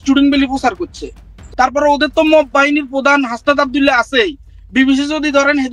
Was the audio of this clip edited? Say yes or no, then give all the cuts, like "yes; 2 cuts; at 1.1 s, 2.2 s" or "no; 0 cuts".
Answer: yes; 1 cut; at 1.4 s